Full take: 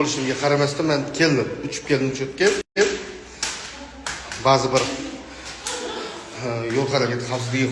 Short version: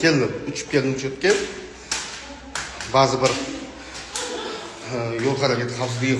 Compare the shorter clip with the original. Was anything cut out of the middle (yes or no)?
yes